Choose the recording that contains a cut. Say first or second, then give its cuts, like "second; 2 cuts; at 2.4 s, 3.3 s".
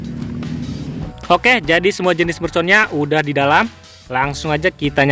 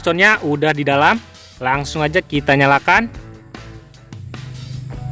first; 1 cut; at 1.1 s